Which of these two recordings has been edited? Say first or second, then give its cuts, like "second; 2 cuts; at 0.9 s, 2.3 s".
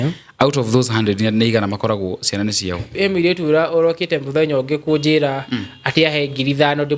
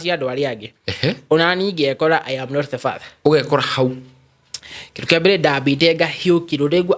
first; 1 cut; at 2.9 s